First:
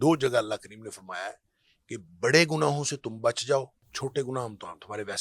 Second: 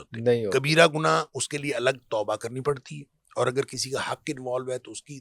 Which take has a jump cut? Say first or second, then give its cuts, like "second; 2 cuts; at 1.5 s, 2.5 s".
first; 1 cut; at 3.8 s